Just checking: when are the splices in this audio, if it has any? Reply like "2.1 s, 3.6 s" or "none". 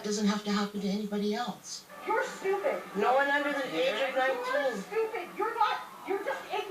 1.9 s

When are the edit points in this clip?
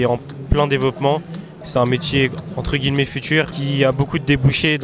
3.5 s

